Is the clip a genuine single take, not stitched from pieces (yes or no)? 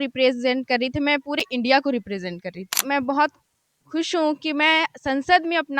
no